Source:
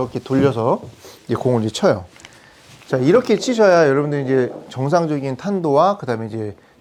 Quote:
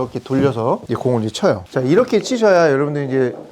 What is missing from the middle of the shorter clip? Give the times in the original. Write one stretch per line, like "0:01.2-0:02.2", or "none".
0:00.8-0:01.2
0:02.0-0:02.8